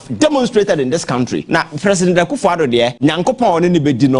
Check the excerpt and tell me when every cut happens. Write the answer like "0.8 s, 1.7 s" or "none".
1.4 s, 2.9 s